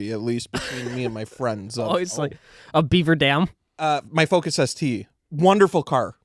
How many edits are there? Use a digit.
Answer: 0